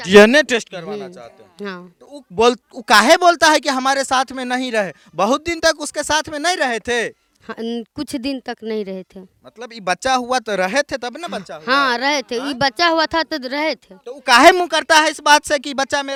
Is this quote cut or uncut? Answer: uncut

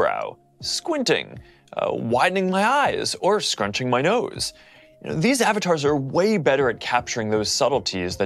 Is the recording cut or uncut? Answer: uncut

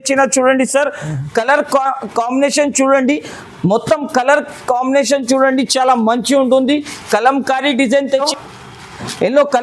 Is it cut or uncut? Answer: cut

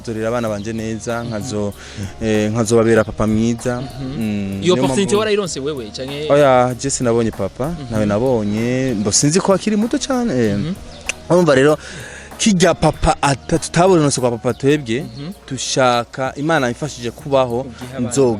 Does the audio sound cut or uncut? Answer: uncut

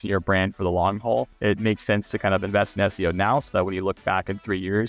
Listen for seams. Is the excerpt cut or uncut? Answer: cut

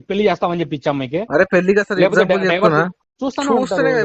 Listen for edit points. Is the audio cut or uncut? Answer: cut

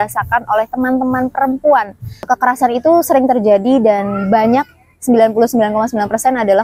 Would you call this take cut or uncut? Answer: cut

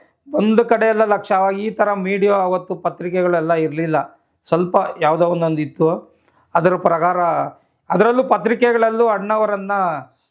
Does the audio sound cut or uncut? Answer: uncut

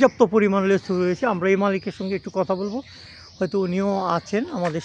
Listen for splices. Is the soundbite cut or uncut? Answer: uncut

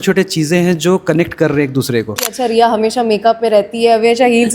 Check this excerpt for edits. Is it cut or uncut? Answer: cut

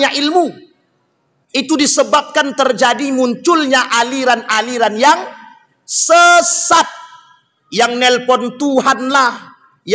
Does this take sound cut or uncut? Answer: uncut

